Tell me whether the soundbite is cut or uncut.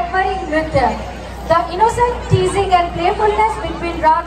uncut